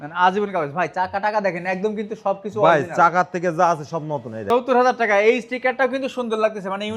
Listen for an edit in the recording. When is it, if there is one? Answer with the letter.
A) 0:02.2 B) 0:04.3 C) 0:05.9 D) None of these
B